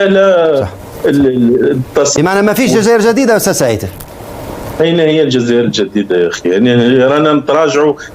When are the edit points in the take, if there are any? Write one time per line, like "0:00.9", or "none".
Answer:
0:02.2